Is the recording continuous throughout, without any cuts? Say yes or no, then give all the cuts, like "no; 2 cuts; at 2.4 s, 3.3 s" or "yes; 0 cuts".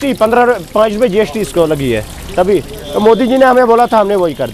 yes; 0 cuts